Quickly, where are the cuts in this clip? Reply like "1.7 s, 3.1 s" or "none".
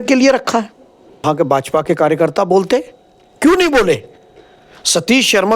1.2 s